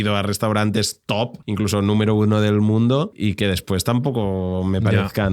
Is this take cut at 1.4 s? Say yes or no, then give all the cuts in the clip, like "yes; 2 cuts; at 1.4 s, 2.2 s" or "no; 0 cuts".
yes; 2 cuts; at 1.4 s, 3.2 s